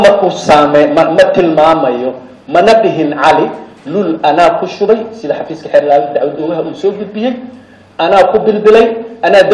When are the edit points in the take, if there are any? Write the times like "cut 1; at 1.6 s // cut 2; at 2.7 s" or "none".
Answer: none